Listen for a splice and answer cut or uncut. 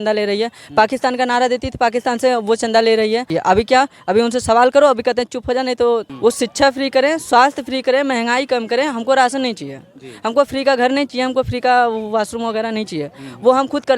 cut